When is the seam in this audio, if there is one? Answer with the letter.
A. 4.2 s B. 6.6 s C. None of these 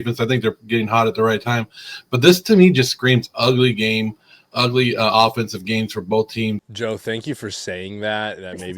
B